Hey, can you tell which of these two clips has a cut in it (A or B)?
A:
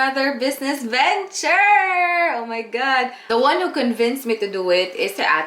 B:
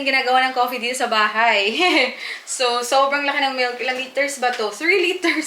A